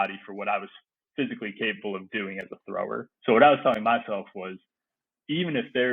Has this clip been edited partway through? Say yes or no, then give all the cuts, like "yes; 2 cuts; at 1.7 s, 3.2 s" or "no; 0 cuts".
yes; 1 cut; at 3.0 s